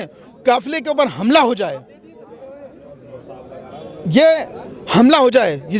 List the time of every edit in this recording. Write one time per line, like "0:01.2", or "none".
none